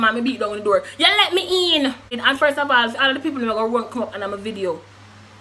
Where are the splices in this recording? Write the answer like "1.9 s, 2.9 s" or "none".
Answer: 2.1 s